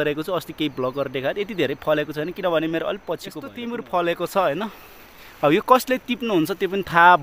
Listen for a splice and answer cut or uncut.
cut